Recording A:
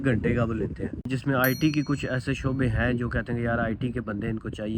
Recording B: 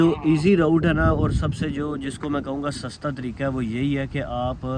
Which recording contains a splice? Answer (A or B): A